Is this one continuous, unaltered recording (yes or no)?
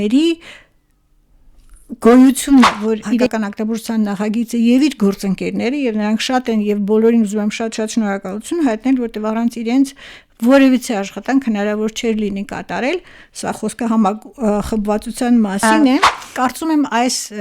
no